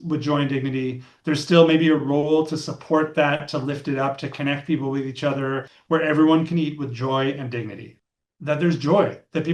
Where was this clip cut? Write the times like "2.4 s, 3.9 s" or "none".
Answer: 5.7 s, 7.9 s